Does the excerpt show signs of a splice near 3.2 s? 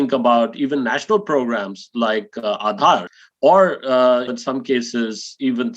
yes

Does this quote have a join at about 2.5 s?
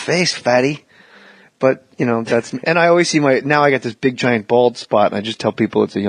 yes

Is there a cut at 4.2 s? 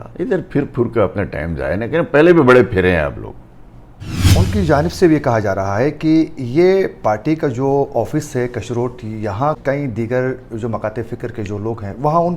yes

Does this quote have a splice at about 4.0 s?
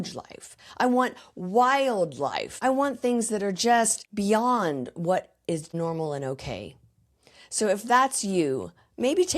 yes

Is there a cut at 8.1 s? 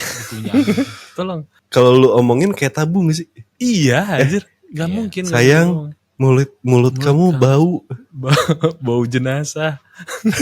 no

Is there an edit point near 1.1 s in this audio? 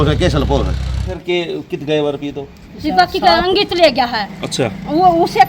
yes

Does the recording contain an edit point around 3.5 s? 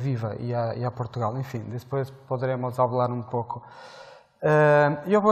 yes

